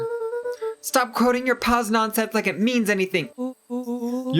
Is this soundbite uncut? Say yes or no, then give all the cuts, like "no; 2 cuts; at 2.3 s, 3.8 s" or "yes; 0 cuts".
no; 1 cut; at 3.3 s